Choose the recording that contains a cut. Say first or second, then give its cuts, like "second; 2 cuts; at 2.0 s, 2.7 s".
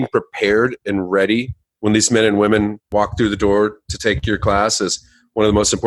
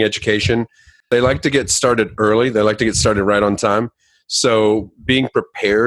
second; 1 cut; at 1.0 s